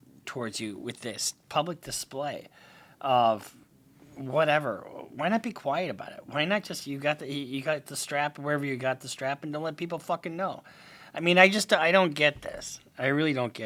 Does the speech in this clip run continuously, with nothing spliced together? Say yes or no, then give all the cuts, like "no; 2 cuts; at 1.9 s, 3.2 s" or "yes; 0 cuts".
yes; 0 cuts